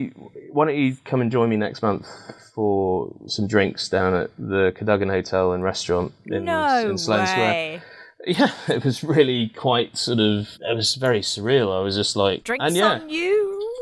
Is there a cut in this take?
yes; 2 cuts; at 10.5 s, 12.5 s

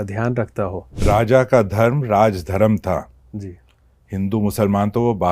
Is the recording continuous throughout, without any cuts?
no; 1 cut; at 1.0 s

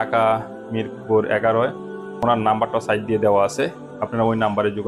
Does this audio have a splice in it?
yes; 1 cut; at 2.2 s

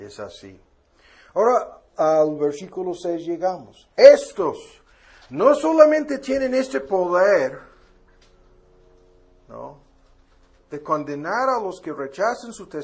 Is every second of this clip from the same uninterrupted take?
no; 1 cut; at 6.2 s

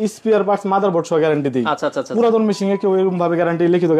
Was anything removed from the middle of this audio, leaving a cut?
no; 0 cuts

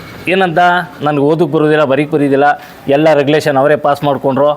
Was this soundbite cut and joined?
yes; 1 cut; at 0.9 s

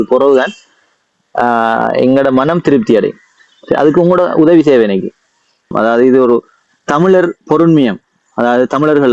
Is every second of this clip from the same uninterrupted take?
no; 1 cut; at 5.7 s

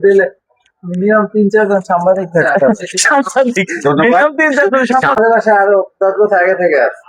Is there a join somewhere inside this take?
yes; 1 cut; at 5.2 s

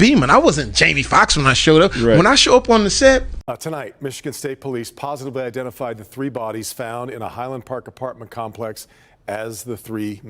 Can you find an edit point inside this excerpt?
yes; 1 cut; at 3.4 s

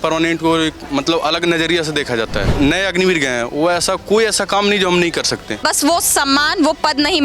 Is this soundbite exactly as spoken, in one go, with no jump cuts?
no; 2 cuts; at 2.5 s, 5.6 s

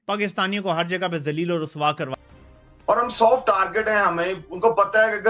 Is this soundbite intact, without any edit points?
no; 1 cut; at 2.1 s

